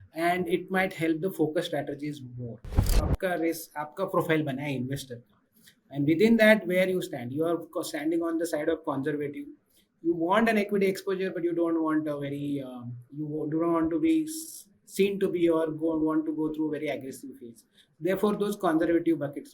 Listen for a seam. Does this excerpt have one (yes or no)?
yes